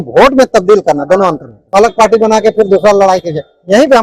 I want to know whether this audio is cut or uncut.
cut